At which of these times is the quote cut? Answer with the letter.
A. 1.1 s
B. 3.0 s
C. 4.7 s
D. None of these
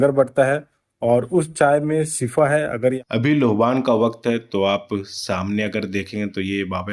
B